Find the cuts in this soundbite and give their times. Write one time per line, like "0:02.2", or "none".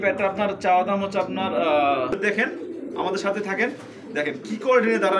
0:02.2